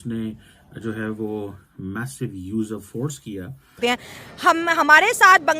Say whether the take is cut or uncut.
cut